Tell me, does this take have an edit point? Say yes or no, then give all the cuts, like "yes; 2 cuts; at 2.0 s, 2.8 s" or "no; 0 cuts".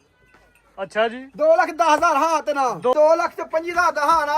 yes; 1 cut; at 2.9 s